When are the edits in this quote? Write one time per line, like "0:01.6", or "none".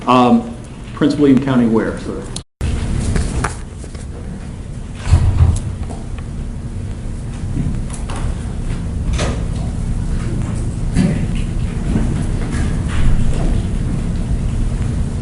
none